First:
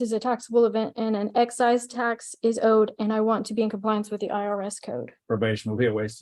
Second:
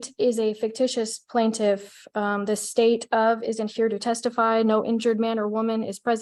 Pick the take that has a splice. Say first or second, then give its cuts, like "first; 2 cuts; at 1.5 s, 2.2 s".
first; 1 cut; at 5.2 s